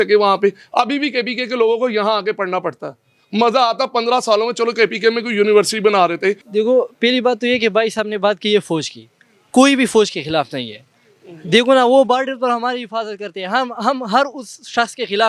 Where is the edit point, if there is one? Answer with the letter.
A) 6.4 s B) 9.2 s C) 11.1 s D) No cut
A